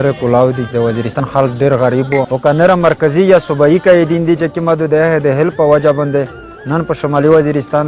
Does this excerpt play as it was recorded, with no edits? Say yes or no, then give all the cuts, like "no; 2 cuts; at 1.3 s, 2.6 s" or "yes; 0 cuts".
no; 2 cuts; at 1.2 s, 2.3 s